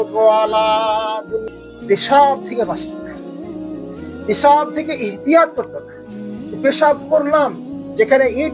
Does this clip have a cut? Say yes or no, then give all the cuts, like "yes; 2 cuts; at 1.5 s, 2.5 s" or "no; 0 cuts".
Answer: yes; 1 cut; at 1.4 s